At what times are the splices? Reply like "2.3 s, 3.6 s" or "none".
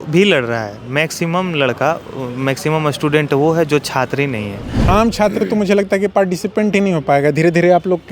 4.8 s